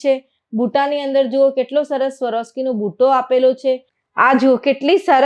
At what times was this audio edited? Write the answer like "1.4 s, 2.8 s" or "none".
4.0 s

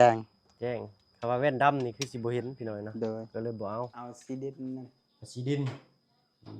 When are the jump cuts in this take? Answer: 4.1 s

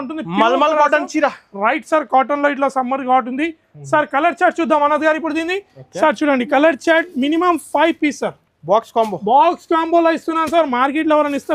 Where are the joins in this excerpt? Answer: none

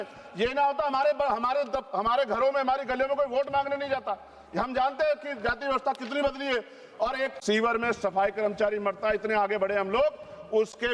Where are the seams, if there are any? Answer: 7.4 s

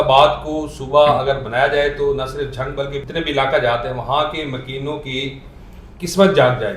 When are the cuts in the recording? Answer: 3.0 s

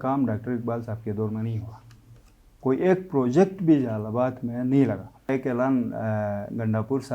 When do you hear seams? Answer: 5.3 s

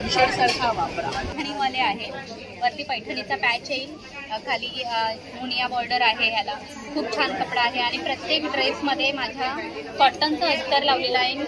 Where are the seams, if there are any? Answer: 1.3 s

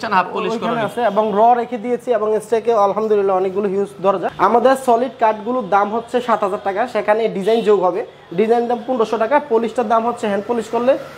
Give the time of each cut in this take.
4.3 s

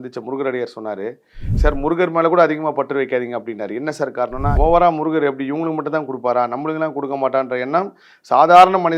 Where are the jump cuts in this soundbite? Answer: 1.5 s, 4.5 s

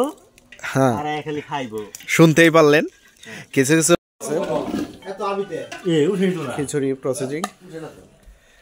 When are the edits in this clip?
4.0 s

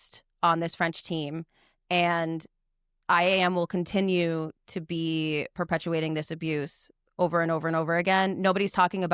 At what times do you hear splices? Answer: none

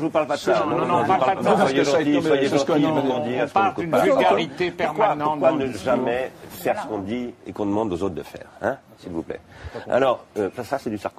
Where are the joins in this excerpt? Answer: 2.9 s

